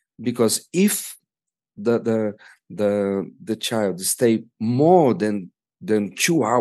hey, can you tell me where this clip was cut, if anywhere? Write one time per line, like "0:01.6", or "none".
none